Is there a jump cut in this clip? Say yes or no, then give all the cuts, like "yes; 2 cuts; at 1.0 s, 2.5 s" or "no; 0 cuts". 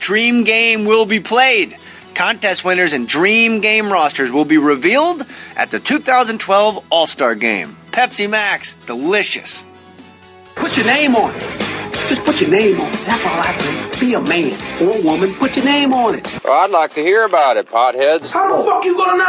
yes; 1 cut; at 15.9 s